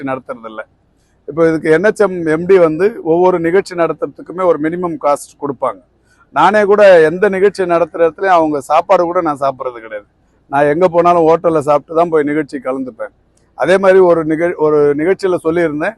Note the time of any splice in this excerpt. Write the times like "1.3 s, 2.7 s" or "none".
none